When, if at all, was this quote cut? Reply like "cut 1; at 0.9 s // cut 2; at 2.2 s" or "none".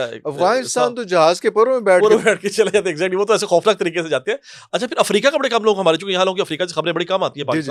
none